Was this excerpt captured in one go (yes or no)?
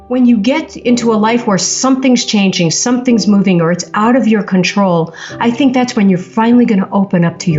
yes